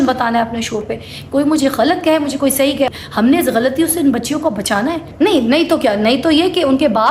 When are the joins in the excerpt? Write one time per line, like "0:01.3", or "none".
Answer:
0:02.9
0:05.1